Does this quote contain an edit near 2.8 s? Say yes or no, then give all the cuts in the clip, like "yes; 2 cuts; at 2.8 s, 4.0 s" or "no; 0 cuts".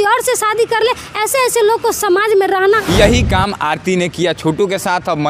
yes; 1 cut; at 2.8 s